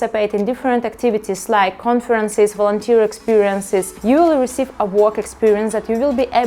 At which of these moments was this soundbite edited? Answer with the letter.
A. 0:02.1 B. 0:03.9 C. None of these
B